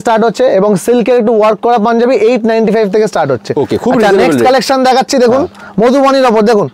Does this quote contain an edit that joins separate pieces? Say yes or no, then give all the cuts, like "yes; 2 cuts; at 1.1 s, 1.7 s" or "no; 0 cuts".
no; 0 cuts